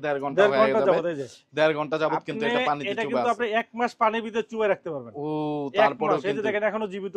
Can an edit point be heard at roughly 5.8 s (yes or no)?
no